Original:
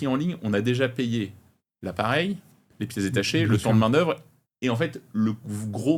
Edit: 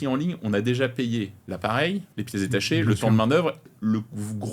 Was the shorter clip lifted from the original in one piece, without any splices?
no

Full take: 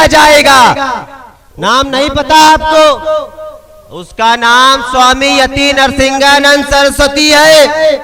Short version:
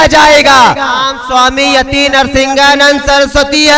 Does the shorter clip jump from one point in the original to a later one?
yes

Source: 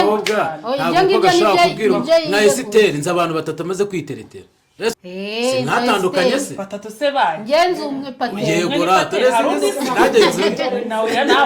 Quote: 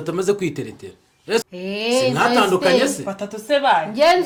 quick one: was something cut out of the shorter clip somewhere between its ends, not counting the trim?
no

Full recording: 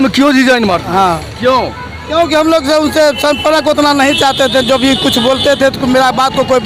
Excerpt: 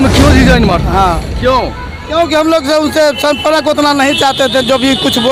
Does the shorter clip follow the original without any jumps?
yes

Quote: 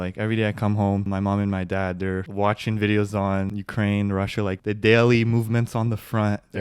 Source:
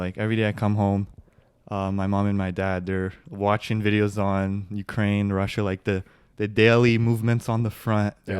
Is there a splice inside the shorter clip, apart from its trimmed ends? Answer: yes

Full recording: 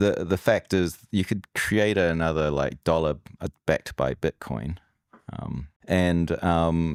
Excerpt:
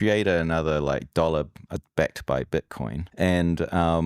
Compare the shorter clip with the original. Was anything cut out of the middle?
yes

